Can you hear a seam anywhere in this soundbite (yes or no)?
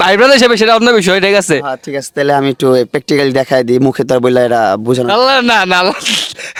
no